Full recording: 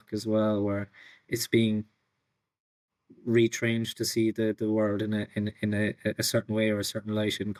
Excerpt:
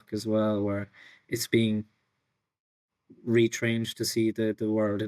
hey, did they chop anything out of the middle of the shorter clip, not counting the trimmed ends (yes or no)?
no